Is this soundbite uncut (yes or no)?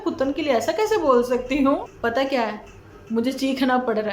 no